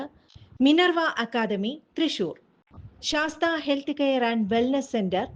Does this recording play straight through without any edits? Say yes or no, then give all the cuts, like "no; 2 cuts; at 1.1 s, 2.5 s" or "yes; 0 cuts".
yes; 0 cuts